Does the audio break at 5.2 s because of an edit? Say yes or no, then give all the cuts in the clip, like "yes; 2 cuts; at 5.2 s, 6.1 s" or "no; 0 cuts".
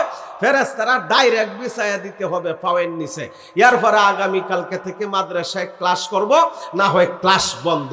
no; 0 cuts